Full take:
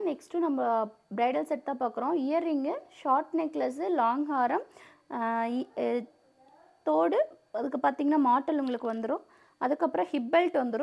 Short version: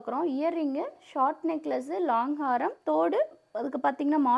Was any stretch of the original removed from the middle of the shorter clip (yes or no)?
yes